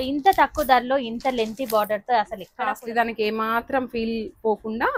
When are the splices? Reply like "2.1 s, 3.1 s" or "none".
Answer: 2.5 s